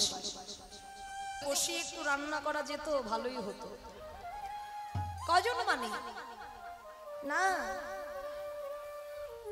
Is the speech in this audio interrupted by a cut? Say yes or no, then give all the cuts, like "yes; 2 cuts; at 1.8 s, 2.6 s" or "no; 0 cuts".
yes; 1 cut; at 1.4 s